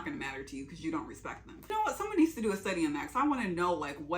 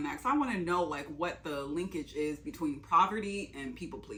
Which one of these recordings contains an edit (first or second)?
first